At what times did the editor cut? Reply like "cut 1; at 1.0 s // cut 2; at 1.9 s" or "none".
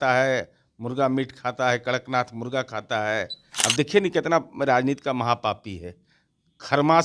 cut 1; at 3.4 s